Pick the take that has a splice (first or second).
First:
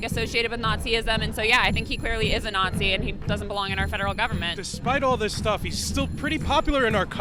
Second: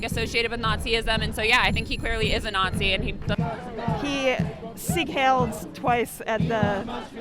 second